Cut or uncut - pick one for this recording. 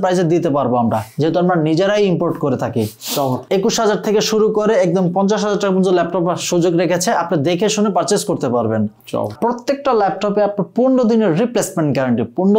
cut